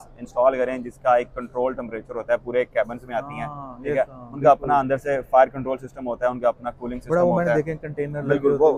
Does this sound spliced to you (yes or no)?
no